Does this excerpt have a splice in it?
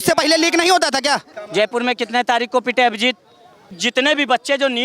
yes; 2 cuts; at 1.2 s, 3.8 s

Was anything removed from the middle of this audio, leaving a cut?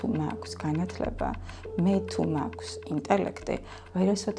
no; 0 cuts

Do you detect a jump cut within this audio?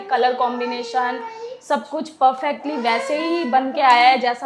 no; 0 cuts

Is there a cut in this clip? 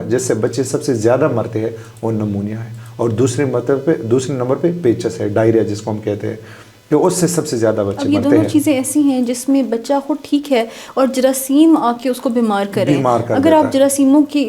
no; 0 cuts

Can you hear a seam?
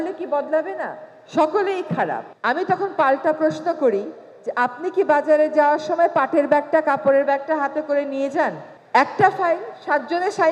yes; 2 cuts; at 2.3 s, 8.6 s

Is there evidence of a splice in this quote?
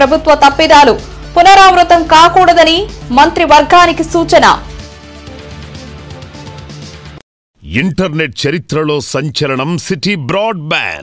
yes; 1 cut; at 7.5 s

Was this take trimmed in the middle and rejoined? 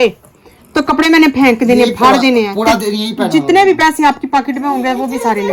no; 0 cuts

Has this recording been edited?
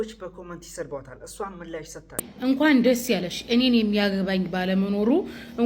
yes; 1 cut; at 2.2 s

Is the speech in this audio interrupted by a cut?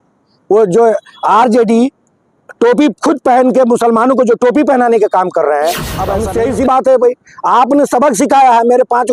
yes; 1 cut; at 6.1 s

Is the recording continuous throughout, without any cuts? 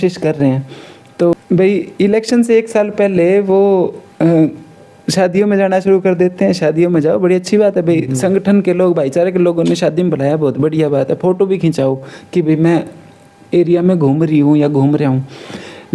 no; 1 cut; at 1.3 s

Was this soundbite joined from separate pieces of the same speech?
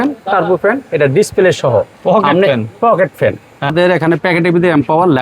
yes; 1 cut; at 3.7 s

